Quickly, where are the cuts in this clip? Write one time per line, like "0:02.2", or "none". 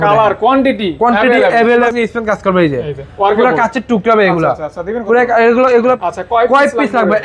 0:01.9
0:06.0